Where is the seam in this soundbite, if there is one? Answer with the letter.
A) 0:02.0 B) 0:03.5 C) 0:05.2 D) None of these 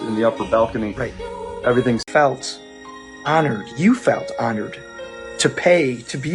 A